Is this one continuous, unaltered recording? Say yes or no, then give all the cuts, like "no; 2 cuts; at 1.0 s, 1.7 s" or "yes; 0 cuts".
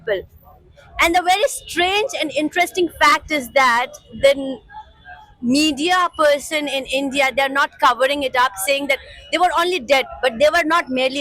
yes; 0 cuts